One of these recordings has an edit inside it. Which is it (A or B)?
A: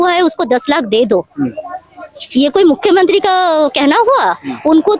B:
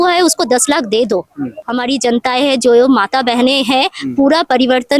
B